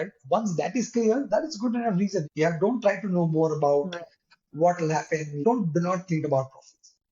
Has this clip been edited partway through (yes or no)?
yes